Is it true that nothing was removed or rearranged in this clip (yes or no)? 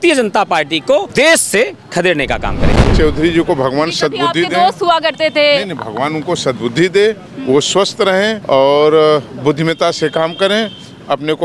no